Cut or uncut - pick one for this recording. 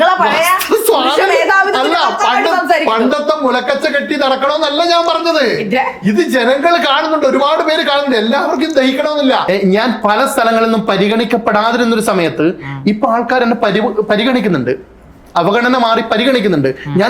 cut